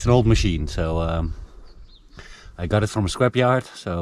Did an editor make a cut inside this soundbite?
no; 0 cuts

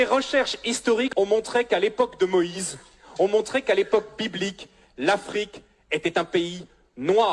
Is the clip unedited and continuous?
no; 1 cut; at 1.1 s

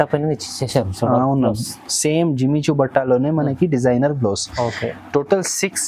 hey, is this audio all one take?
yes; 0 cuts

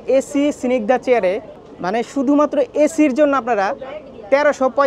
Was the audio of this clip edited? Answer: no; 0 cuts

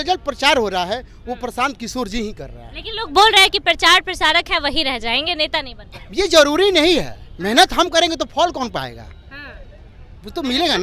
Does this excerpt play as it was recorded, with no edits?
yes; 0 cuts

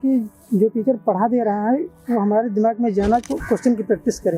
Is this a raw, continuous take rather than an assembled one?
no; 1 cut; at 3.2 s

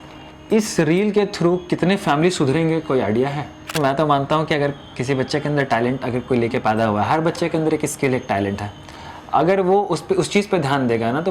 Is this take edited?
yes; 1 cut; at 3.8 s

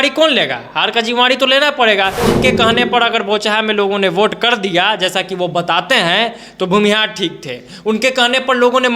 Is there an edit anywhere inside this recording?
yes; 1 cut; at 2.2 s

